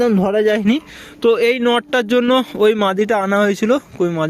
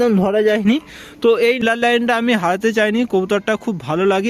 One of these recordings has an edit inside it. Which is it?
second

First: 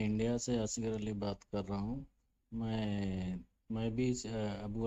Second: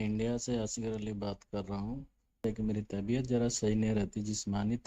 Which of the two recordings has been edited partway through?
second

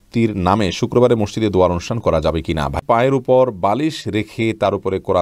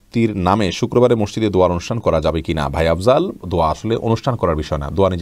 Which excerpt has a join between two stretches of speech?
first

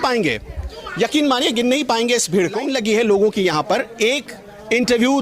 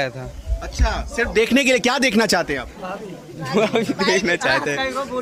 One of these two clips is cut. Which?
first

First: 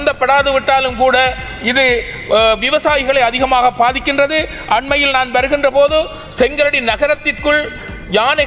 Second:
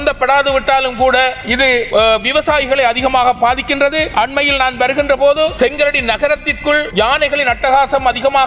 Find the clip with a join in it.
second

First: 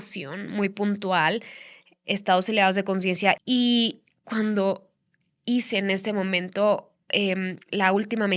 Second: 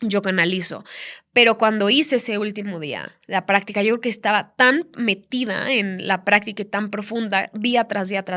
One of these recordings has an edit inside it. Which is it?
first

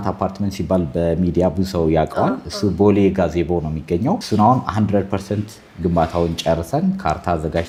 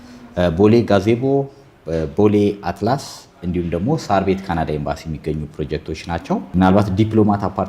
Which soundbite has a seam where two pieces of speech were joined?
second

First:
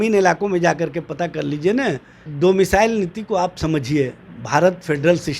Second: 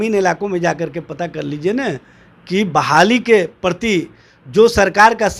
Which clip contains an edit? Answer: first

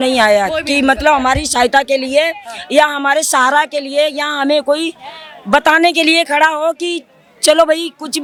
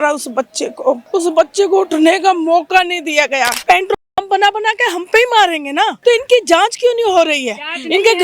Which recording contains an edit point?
second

